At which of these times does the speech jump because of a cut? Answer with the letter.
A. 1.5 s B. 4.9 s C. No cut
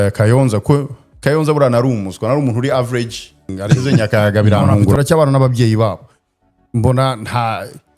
B